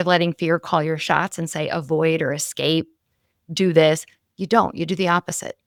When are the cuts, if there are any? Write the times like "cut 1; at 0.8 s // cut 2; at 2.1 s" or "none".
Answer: none